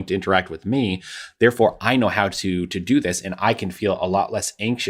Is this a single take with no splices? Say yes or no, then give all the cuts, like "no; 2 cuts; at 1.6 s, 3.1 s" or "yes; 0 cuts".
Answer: yes; 0 cuts